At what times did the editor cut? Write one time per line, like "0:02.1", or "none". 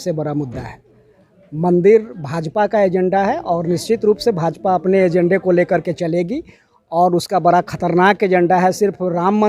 none